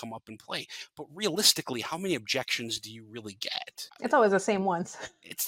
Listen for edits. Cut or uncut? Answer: cut